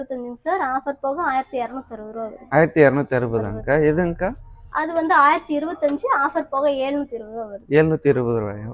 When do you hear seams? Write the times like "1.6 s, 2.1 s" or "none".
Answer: none